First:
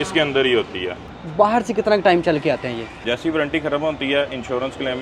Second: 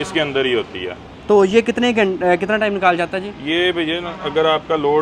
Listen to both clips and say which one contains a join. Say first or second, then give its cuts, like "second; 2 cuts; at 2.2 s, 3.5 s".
first; 2 cuts; at 1.2 s, 3.0 s